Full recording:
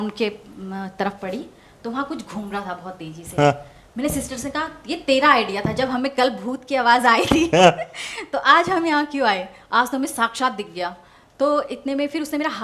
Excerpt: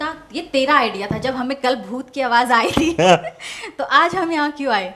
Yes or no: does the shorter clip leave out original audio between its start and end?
no